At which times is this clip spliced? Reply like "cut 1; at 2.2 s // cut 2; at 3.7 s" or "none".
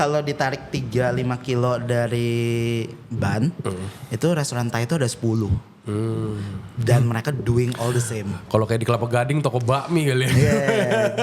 none